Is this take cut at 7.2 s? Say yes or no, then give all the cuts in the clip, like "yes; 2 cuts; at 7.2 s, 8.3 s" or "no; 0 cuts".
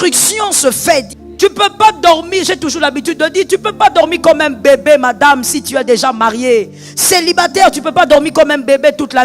no; 1 cut; at 1.1 s